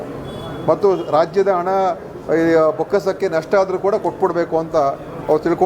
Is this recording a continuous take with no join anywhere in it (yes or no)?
yes